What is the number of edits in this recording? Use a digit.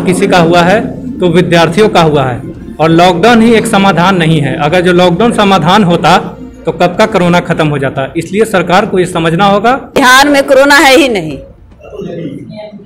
1